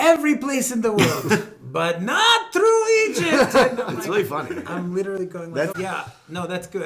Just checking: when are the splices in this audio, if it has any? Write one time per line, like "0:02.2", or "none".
0:05.7